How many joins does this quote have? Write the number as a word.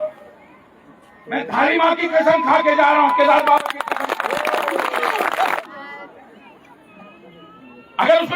one